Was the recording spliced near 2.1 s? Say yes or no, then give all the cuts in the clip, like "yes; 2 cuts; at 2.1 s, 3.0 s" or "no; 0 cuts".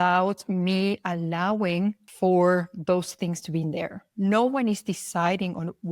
yes; 1 cut; at 2.1 s